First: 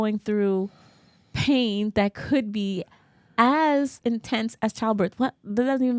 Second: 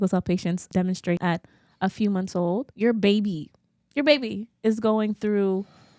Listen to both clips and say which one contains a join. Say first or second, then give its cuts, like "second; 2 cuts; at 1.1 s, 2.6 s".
second; 2 cuts; at 1.1 s, 2.7 s